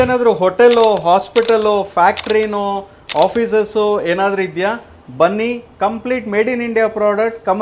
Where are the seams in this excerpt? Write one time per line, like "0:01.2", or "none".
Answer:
none